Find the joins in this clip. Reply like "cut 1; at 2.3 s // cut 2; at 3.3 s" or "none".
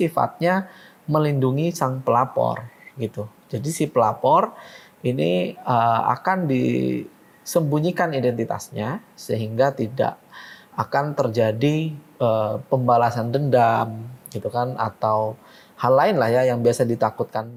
none